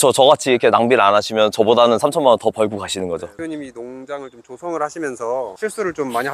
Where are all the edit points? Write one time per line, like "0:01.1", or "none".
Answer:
0:03.3

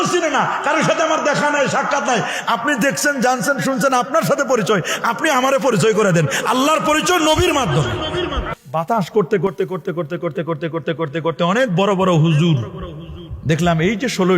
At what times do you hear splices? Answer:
0:08.6

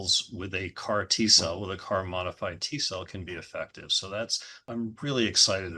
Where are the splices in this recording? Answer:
0:04.6

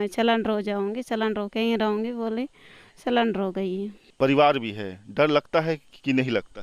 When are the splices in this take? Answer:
0:04.0

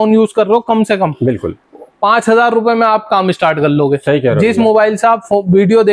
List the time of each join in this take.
none

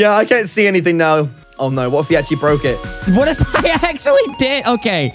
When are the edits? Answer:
0:01.4
0:03.0

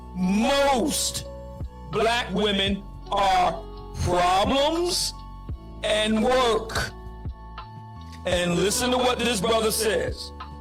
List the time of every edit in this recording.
none

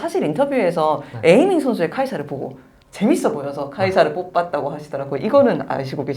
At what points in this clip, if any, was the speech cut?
0:05.0

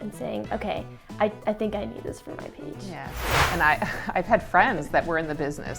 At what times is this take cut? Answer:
0:03.3

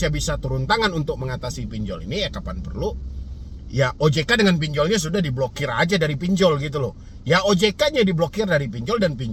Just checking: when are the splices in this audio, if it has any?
none

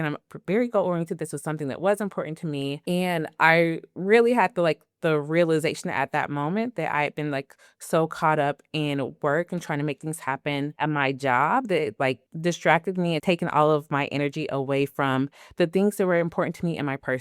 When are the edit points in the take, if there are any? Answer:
0:12.3
0:13.2

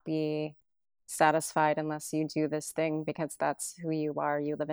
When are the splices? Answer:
none

